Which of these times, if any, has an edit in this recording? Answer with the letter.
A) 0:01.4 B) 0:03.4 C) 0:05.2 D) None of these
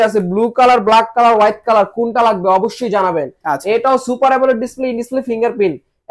D